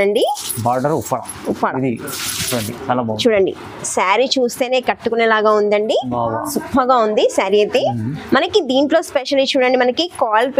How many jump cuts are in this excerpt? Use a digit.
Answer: 0